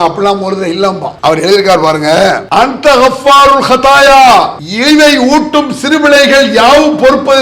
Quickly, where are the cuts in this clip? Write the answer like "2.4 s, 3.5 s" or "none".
1.1 s, 2.4 s, 4.6 s